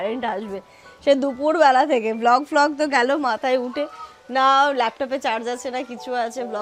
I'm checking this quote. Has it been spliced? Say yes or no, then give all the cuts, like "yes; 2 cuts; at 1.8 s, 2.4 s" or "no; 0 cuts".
no; 0 cuts